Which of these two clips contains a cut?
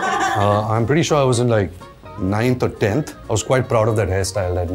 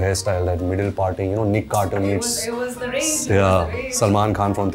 first; 1 cut; at 3.2 s

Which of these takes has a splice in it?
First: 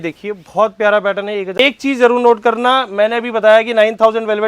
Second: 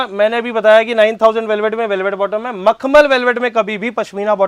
first; 1 cut; at 1.6 s

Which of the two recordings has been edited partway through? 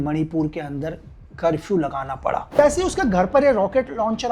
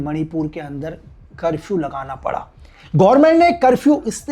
first; 1 cut; at 2.4 s

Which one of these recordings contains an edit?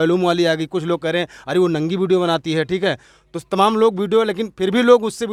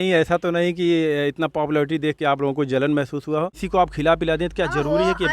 second; 1 cut; at 3.6 s

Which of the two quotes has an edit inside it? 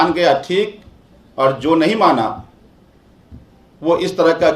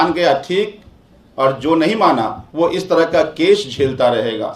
second; 1 cut; at 2.4 s

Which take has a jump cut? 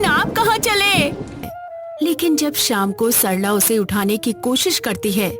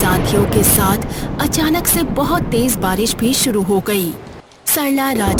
first; 1 cut; at 1.6 s

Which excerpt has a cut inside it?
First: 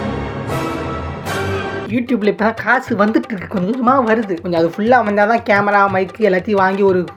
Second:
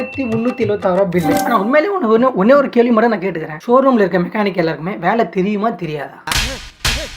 second; 2 cuts; at 1.4 s, 3.6 s

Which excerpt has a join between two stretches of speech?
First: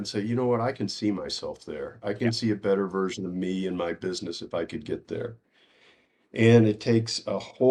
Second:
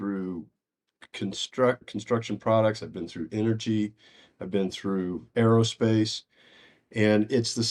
second; 2 cuts; at 1.8 s, 5.2 s

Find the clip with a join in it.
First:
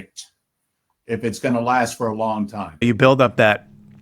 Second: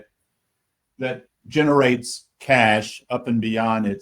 first; 1 cut; at 2.8 s

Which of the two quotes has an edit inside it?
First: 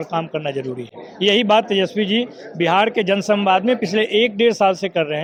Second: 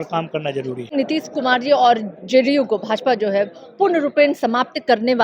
second; 1 cut; at 0.9 s

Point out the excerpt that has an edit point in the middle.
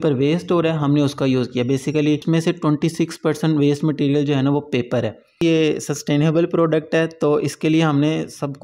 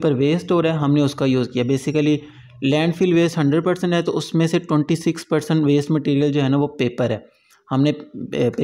first; 2 cuts; at 2.2 s, 5.4 s

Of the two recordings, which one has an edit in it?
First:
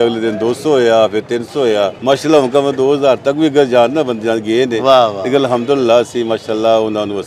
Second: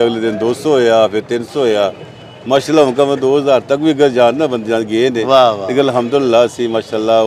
first; 1 cut; at 2.0 s

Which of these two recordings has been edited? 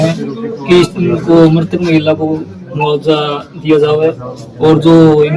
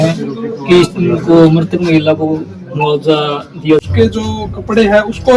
second; 1 cut; at 3.8 s

